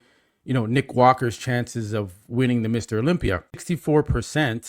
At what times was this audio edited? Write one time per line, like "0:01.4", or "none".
0:03.6

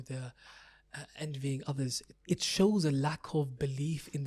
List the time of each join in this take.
0:02.1

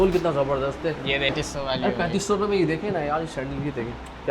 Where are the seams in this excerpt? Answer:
0:01.3

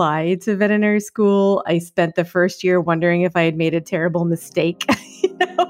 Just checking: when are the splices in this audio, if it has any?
none

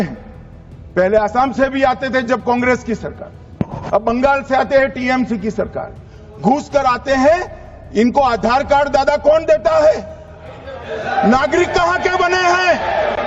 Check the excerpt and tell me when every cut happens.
none

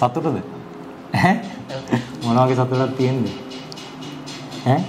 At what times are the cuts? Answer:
none

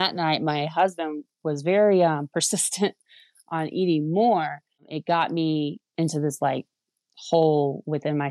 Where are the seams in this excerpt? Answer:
0:04.9
0:05.8

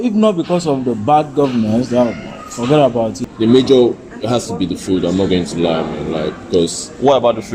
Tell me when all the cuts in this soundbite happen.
0:03.2

